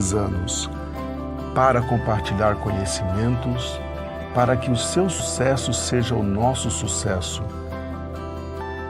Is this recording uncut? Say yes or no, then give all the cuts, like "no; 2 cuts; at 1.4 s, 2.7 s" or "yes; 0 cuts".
no; 1 cut; at 5.2 s